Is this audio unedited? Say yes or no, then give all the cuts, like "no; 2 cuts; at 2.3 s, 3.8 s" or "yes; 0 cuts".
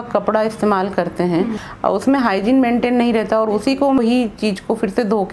no; 2 cuts; at 1.6 s, 4.0 s